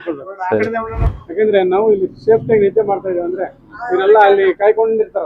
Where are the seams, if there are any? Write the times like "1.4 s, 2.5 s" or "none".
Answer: 1.0 s